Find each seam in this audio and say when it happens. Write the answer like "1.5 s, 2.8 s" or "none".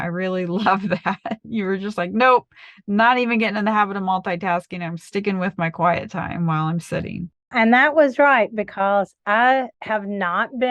9.8 s

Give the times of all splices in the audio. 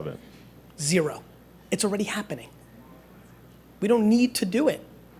none

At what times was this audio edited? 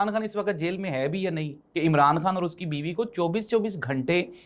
1.6 s

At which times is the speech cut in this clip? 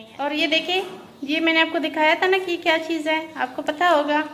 none

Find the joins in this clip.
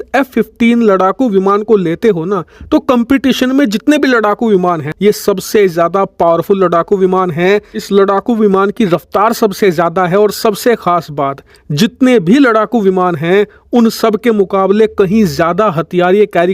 4.9 s

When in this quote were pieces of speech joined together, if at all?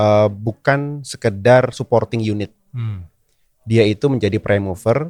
none

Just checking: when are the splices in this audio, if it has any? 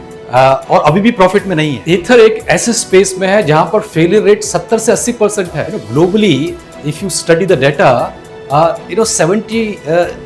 1.7 s, 5.8 s

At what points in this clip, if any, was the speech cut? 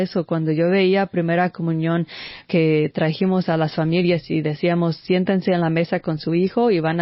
2.4 s

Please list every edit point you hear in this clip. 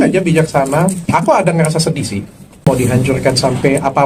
2.7 s

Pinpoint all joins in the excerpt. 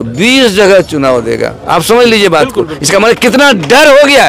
none

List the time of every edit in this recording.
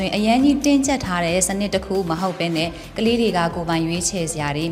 none

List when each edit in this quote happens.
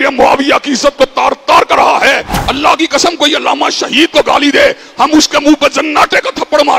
2.3 s

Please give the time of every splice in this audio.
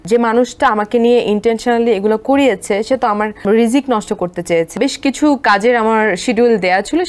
3.4 s, 4.7 s

